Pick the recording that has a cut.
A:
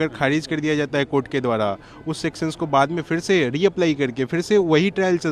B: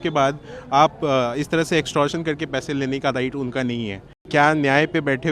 B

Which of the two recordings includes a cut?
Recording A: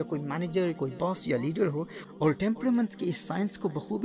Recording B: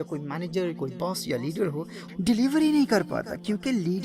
B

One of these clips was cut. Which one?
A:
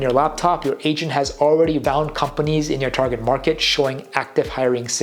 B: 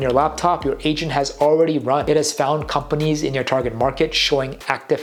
A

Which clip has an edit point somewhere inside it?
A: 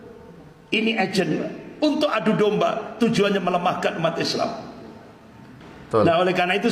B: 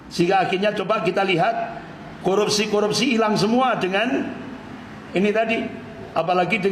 A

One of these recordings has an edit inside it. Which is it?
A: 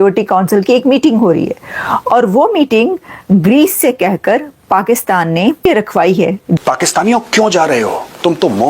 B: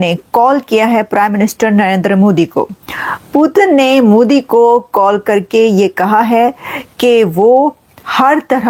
A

